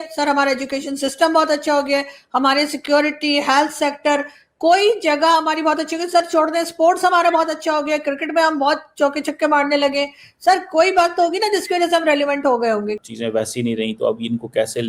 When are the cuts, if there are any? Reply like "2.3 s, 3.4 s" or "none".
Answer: 13.0 s